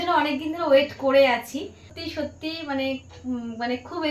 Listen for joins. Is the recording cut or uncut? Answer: cut